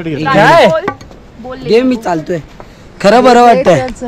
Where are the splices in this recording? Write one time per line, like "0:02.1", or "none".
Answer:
none

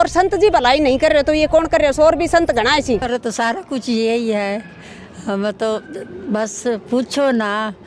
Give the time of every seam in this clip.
0:03.1

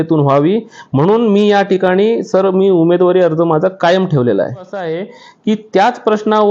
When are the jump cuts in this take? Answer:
0:05.0

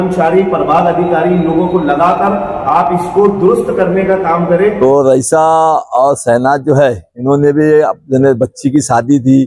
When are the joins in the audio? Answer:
0:04.8

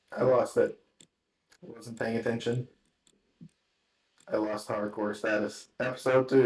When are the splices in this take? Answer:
0:01.4

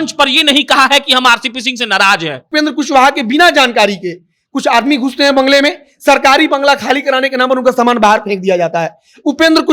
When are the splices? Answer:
0:02.4

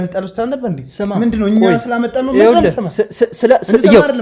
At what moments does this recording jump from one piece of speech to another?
none

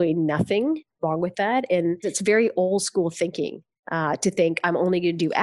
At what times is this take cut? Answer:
0:02.1

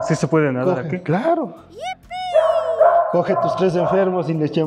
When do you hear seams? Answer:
none

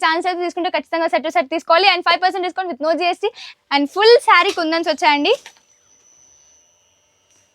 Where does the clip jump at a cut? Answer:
0:03.5

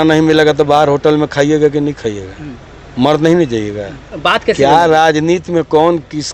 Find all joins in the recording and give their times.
0:04.1

